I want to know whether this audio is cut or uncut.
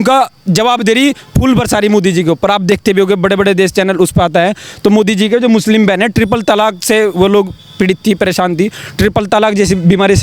uncut